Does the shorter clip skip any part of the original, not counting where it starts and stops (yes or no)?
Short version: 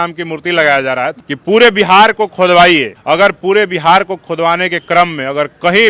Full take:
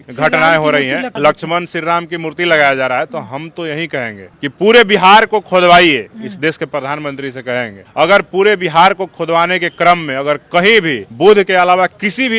yes